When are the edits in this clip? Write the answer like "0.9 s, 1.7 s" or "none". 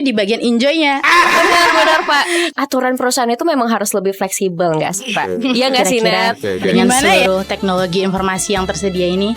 2.5 s, 7.1 s